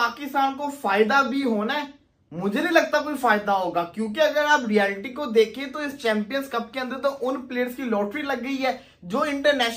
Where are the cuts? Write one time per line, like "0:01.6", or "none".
none

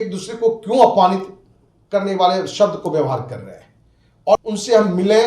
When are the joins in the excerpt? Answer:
0:04.4

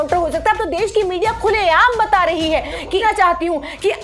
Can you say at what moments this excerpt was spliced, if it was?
0:03.0

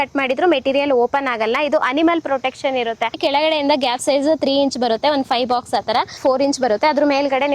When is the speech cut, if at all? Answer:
0:03.2
0:06.2

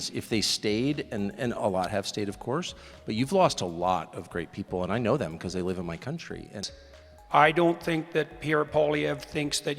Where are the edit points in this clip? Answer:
0:06.6

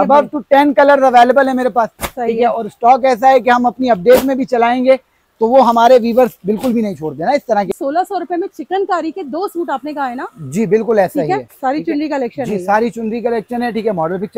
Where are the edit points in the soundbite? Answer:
0:07.7
0:11.5

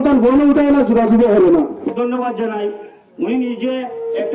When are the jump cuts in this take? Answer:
0:01.8

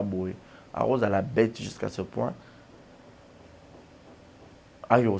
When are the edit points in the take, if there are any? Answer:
none

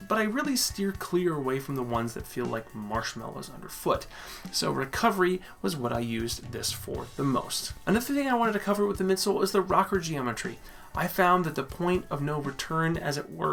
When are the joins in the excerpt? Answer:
none

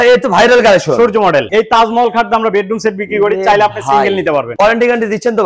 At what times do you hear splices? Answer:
0:01.5
0:04.5

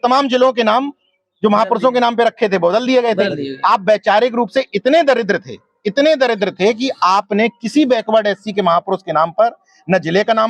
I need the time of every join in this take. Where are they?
none

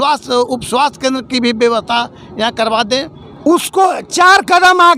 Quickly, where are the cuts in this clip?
0:03.2

